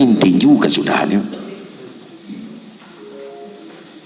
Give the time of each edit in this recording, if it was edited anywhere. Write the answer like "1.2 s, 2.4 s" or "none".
none